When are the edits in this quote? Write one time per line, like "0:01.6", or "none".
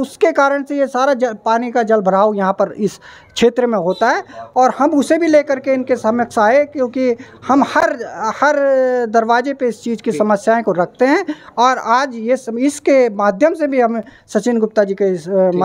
none

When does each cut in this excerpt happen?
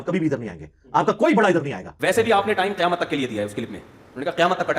0:01.8

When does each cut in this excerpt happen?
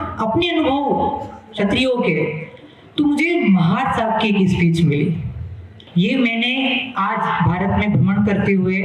0:05.8

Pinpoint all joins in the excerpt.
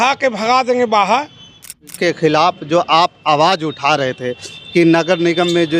0:01.9

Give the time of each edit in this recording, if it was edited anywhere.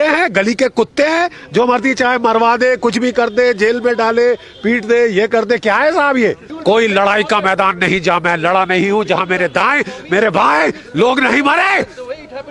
0:06.5

